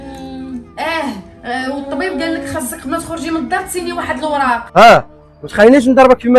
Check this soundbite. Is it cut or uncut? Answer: cut